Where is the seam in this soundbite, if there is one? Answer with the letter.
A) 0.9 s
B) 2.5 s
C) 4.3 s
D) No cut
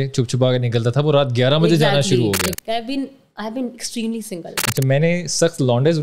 B